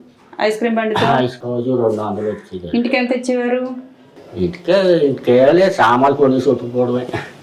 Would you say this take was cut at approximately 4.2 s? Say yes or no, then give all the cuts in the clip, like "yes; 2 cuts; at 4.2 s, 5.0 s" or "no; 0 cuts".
no; 1 cut; at 1.4 s